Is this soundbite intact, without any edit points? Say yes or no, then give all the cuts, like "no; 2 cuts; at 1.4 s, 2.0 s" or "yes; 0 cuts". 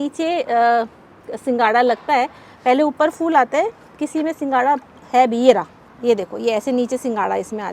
yes; 0 cuts